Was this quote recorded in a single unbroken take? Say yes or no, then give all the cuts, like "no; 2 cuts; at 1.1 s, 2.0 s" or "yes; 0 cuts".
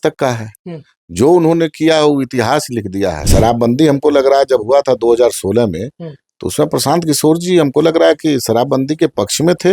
no; 1 cut; at 3.2 s